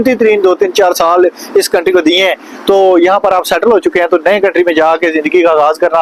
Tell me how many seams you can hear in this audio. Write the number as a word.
zero